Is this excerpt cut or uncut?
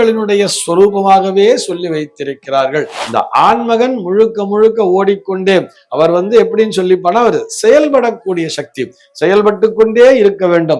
cut